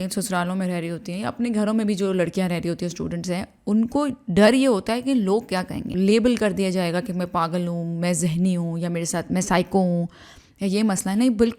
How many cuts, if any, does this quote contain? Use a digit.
1